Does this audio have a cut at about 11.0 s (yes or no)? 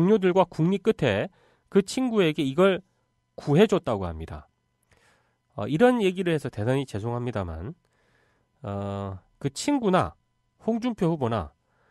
no